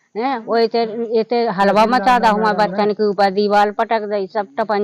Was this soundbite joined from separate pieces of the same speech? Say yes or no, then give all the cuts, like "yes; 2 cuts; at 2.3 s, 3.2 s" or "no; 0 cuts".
no; 0 cuts